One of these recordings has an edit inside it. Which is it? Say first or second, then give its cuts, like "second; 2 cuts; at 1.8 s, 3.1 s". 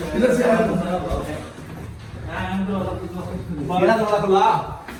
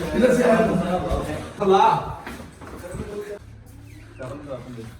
second; 2 cuts; at 1.6 s, 3.4 s